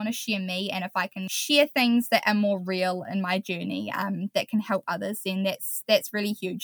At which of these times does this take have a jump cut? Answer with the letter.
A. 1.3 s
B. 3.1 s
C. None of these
A